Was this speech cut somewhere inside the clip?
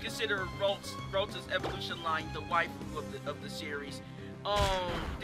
no; 0 cuts

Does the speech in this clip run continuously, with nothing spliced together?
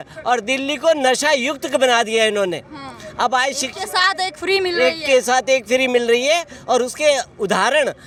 yes; 0 cuts

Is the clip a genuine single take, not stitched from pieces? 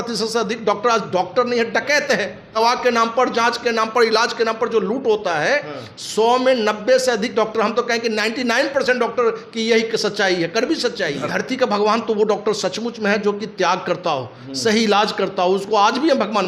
no; 2 cuts; at 2.5 s, 11.3 s

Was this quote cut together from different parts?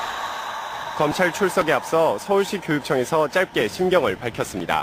no; 0 cuts

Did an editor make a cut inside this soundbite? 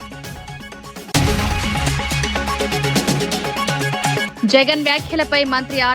yes; 3 cuts; at 1.1 s, 2.4 s, 3.8 s

